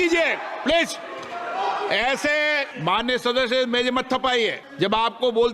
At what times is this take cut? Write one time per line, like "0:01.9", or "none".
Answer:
0:02.7
0:04.6